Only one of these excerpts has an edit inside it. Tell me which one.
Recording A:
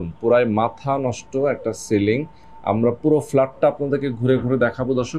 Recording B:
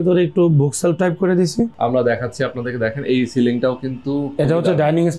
B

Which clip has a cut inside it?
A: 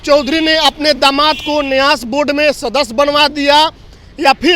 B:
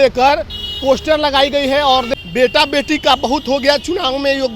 B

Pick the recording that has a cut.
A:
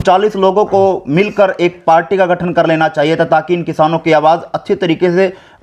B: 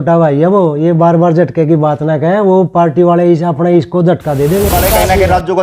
B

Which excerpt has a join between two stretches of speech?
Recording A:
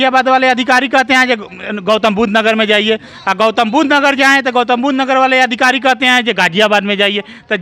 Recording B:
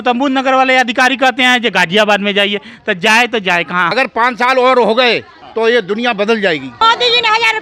B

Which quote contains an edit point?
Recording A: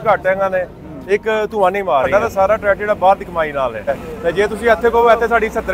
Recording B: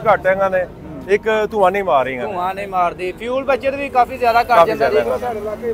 A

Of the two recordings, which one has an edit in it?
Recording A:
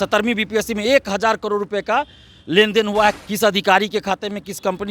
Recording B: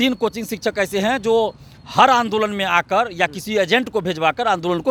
A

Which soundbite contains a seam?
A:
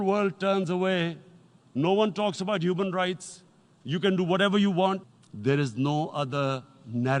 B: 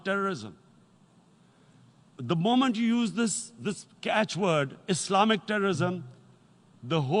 A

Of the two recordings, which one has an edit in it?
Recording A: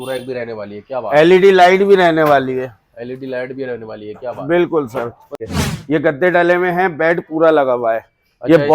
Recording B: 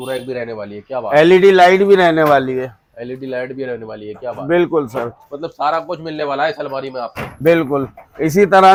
A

